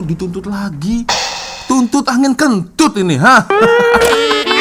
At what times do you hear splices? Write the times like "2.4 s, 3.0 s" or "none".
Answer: none